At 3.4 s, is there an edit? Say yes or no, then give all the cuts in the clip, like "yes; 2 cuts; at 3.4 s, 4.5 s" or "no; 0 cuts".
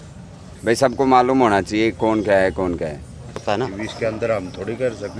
yes; 1 cut; at 3.4 s